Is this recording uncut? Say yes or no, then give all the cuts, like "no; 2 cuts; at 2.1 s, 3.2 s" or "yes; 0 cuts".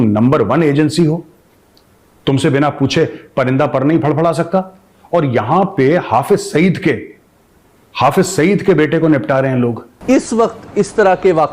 no; 1 cut; at 9.9 s